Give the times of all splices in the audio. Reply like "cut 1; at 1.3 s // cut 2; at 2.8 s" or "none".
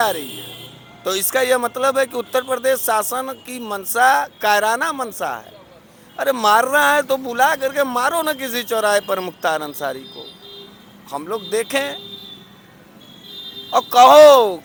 none